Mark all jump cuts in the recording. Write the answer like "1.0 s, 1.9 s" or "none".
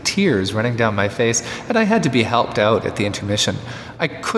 none